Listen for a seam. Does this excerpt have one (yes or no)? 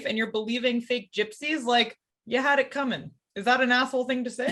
no